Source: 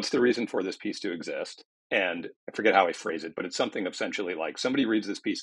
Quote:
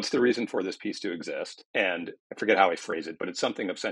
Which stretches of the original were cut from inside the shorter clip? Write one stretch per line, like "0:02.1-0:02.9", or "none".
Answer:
0:01.6-0:01.7